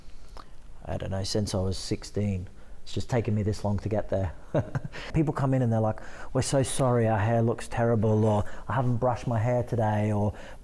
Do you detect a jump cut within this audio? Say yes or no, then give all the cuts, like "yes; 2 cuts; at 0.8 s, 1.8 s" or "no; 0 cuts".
yes; 1 cut; at 5.1 s